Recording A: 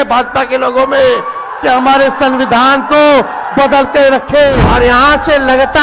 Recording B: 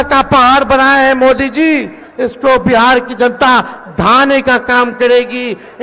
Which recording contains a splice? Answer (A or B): A